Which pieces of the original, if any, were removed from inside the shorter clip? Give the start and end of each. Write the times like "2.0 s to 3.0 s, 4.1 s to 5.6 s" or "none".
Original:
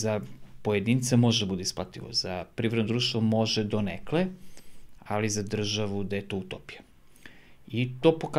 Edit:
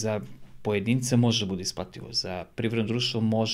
none